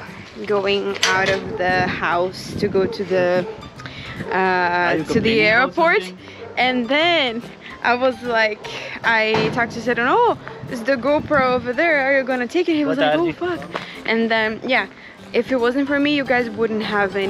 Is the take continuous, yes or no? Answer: yes